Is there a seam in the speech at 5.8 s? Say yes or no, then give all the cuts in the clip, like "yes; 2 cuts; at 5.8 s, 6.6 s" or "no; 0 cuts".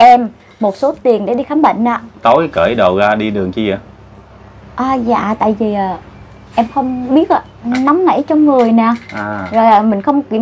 no; 2 cuts; at 2.1 s, 7.7 s